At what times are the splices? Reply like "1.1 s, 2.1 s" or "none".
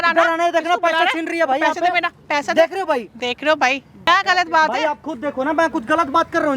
4.0 s